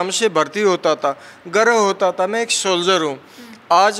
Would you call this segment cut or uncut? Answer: uncut